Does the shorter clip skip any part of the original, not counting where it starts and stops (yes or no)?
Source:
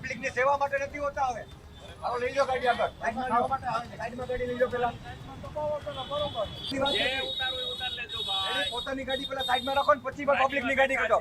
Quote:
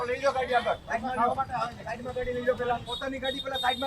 yes